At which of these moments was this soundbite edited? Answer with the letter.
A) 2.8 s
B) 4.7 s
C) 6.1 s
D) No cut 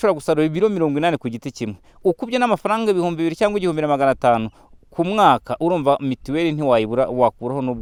D